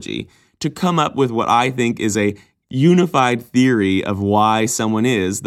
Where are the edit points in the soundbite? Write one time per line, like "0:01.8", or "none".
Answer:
0:02.5